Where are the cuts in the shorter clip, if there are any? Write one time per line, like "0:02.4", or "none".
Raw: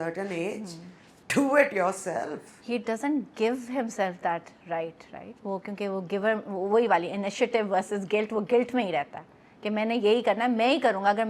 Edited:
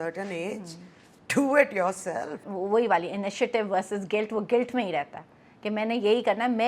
0:02.5